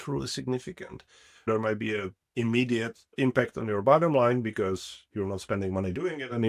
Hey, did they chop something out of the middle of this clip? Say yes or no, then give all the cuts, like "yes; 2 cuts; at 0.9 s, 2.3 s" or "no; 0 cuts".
yes; 2 cuts; at 1.5 s, 3.0 s